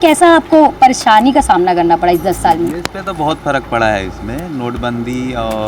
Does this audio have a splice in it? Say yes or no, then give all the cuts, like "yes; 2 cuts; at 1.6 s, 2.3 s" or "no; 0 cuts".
no; 0 cuts